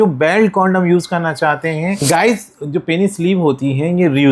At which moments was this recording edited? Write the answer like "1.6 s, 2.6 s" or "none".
2.0 s